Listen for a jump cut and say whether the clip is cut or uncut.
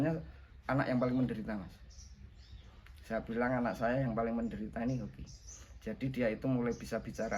uncut